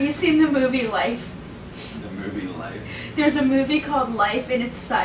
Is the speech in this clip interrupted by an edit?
no; 0 cuts

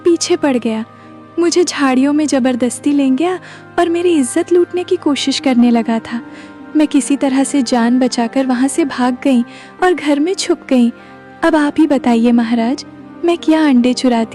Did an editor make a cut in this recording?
no; 0 cuts

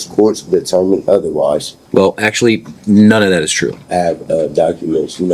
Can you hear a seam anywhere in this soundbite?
yes; 2 cuts; at 1.8 s, 3.8 s

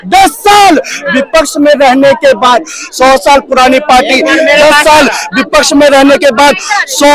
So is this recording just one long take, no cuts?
yes; 0 cuts

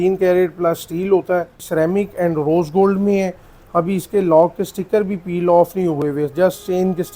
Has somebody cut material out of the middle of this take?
yes; 1 cut; at 1.6 s

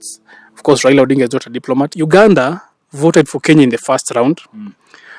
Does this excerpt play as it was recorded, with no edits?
no; 1 cut; at 2.0 s

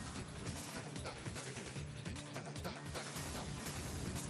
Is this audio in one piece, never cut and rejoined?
no; 1 cut; at 1.0 s

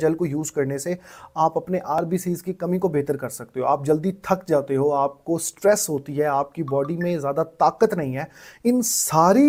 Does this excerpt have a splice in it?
no; 0 cuts

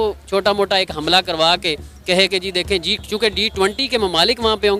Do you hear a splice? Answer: no; 0 cuts

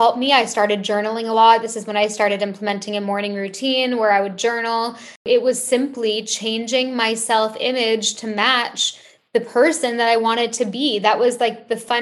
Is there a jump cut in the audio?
yes; 1 cut; at 5.3 s

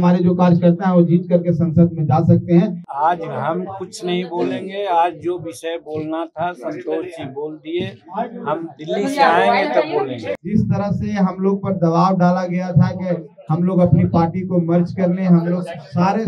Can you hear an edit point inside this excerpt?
yes; 2 cuts; at 2.8 s, 10.2 s

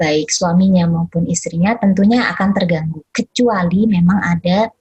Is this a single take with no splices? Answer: yes; 0 cuts

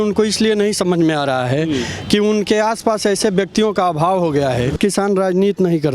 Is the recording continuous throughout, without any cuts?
no; 1 cut; at 4.8 s

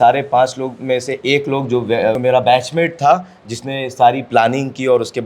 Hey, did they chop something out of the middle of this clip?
yes; 1 cut; at 2.2 s

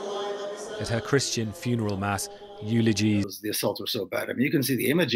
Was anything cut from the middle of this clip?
yes; 1 cut; at 3.4 s

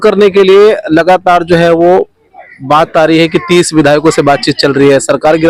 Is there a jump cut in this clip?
no; 0 cuts

